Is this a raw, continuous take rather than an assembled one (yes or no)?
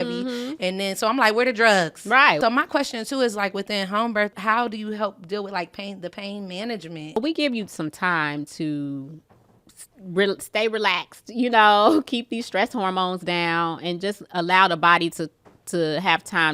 no